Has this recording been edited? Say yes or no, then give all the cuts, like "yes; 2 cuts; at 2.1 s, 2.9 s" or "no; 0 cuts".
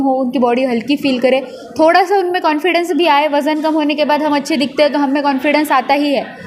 no; 0 cuts